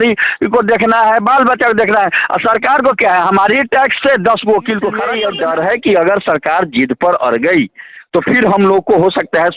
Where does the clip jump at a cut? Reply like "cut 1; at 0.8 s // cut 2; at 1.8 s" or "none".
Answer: cut 1; at 5.2 s